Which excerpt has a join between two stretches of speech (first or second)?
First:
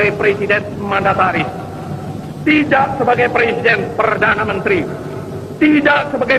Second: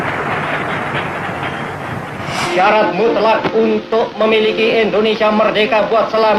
second